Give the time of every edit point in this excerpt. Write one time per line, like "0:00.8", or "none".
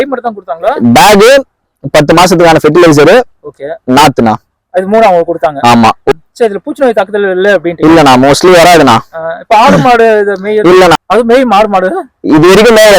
0:06.1
0:10.9